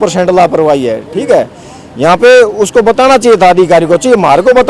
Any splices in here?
no; 0 cuts

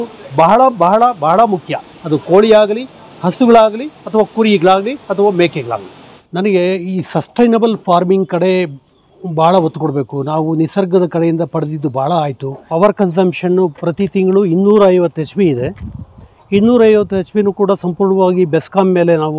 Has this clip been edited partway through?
no; 0 cuts

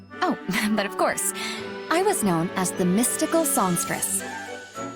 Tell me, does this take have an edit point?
yes; 1 cut; at 4.0 s

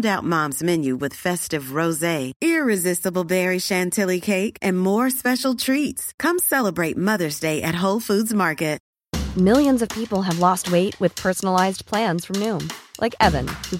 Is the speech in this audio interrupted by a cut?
yes; 1 cut; at 8.9 s

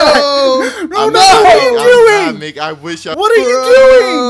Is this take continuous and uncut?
yes; 0 cuts

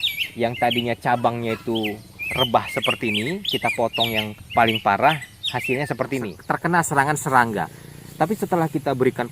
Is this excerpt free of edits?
no; 2 cuts; at 4.4 s, 6.3 s

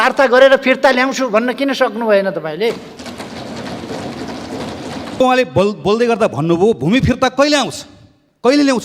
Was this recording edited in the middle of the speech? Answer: yes; 1 cut; at 5.2 s

